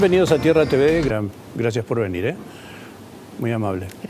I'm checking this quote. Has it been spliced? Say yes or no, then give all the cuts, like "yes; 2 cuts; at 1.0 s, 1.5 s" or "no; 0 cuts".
no; 0 cuts